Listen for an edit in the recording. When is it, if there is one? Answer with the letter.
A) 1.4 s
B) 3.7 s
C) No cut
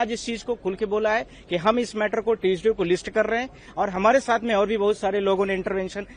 C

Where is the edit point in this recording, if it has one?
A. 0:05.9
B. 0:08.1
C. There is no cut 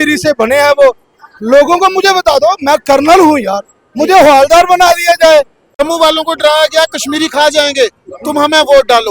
A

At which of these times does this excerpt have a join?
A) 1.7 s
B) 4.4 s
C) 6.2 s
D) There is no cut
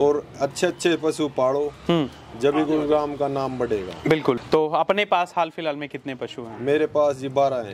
B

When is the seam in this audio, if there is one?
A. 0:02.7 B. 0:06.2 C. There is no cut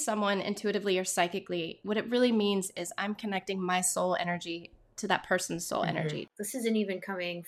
B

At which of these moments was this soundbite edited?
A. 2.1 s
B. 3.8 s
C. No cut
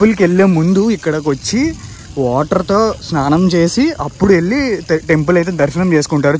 C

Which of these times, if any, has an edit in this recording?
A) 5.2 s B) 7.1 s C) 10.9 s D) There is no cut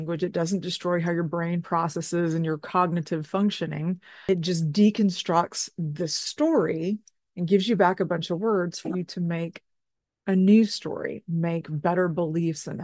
D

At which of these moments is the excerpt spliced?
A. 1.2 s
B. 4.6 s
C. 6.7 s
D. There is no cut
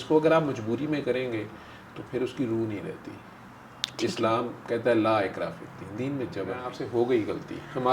C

